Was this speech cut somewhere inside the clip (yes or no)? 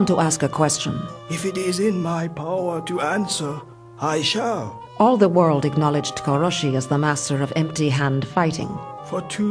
yes